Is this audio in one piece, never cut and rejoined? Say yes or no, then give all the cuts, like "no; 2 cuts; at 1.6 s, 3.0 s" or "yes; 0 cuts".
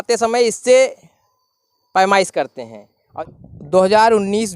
no; 1 cut; at 3.1 s